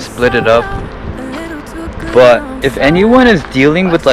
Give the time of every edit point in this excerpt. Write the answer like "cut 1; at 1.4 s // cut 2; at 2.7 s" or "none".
none